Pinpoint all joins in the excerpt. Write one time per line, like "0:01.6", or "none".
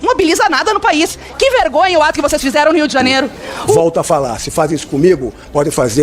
0:03.8